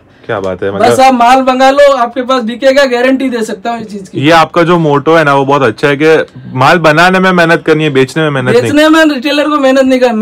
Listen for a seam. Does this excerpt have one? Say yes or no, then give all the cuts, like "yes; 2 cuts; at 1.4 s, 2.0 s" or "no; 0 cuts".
no; 0 cuts